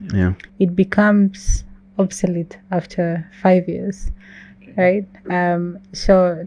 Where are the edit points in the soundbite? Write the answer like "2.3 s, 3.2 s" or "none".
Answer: none